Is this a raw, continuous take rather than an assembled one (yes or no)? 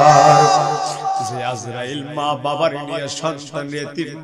no